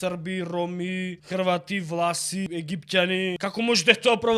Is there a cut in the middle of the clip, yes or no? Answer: yes